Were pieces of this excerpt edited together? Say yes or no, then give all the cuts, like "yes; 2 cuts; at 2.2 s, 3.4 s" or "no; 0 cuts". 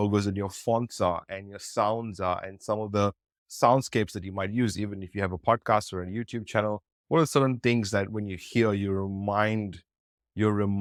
no; 0 cuts